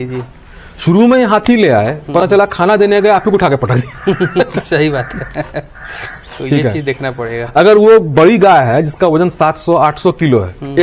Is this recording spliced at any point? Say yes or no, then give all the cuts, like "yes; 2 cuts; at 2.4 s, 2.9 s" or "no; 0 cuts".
no; 0 cuts